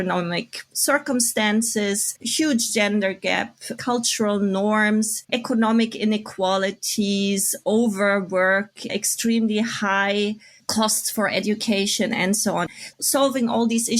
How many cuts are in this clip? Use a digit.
2